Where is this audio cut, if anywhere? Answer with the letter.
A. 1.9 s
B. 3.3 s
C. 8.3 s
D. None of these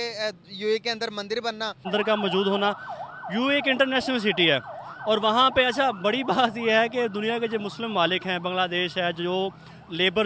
A